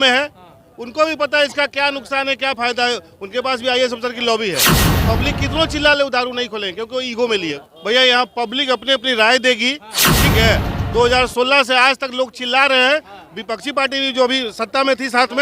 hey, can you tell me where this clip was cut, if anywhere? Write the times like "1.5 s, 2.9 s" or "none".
7.6 s